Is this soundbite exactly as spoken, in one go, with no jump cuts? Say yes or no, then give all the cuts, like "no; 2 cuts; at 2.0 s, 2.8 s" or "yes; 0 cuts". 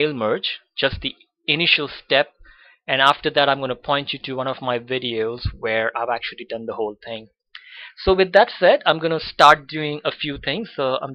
yes; 0 cuts